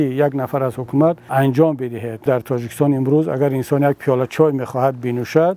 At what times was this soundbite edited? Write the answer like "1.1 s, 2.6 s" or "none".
1.3 s, 2.2 s